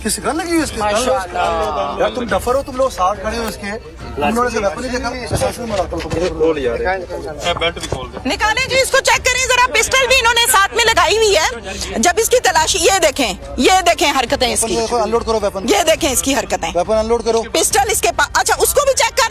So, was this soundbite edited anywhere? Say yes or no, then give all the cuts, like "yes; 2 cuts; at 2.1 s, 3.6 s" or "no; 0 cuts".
yes; 1 cut; at 5.3 s